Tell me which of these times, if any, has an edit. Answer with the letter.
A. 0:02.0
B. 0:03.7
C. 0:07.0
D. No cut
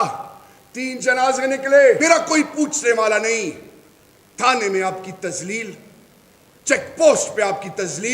A